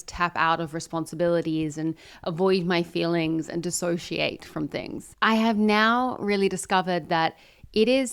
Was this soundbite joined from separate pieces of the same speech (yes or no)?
yes